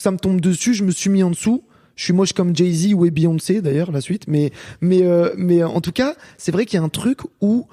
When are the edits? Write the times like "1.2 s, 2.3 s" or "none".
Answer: none